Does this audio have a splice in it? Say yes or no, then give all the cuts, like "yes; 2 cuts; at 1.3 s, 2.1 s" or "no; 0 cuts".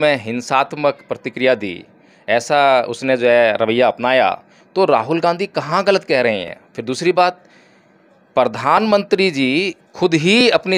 no; 0 cuts